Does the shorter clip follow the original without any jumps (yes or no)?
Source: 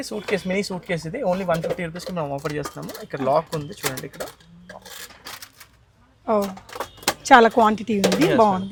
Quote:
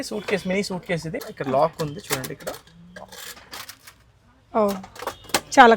no